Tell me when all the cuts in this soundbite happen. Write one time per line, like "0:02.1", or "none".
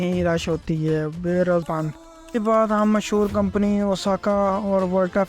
0:01.7